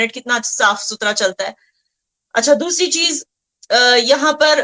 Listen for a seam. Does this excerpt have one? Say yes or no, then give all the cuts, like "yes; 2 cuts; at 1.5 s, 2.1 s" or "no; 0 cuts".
no; 0 cuts